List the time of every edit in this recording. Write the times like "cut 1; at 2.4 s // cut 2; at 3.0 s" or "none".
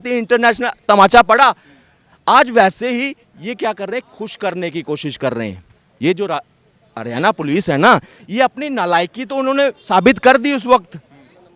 none

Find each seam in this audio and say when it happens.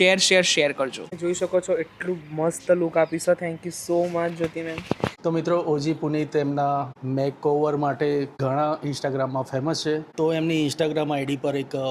cut 1; at 1.1 s // cut 2; at 5.2 s // cut 3; at 7.0 s // cut 4; at 8.3 s // cut 5; at 10.1 s

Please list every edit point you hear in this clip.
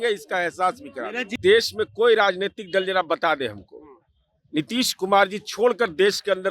cut 1; at 1.3 s

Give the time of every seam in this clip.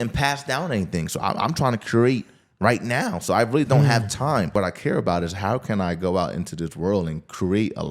cut 1; at 4.5 s

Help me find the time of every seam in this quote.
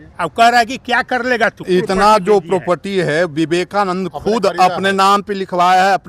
cut 1; at 1.6 s

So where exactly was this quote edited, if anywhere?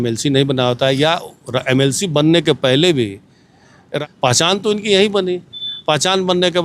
cut 1; at 3.9 s

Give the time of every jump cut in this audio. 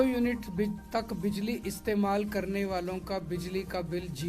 none

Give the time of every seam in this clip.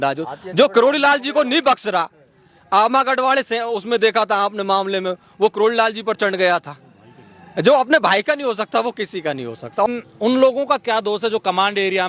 cut 1; at 9.9 s

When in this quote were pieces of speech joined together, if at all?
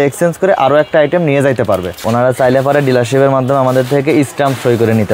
cut 1; at 1.9 s

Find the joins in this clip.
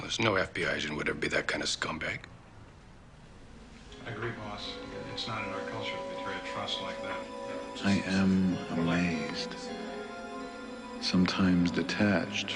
none

